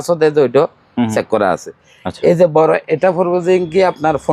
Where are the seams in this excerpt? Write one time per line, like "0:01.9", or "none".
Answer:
none